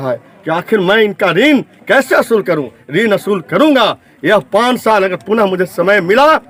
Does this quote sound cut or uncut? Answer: uncut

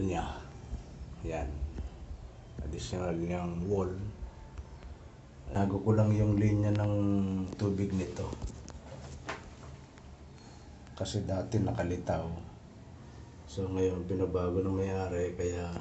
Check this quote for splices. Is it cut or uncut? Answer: cut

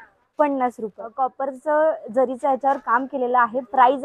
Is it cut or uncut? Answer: cut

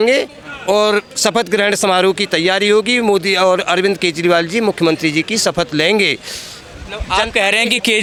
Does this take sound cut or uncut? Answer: uncut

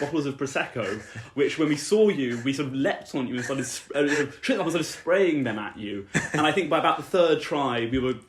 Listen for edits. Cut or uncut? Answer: uncut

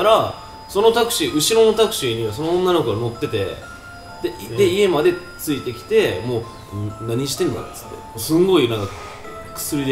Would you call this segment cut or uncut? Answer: uncut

